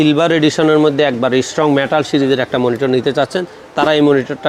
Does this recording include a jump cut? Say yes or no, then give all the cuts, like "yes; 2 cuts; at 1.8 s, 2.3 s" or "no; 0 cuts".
no; 0 cuts